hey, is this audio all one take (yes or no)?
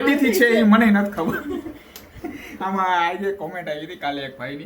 yes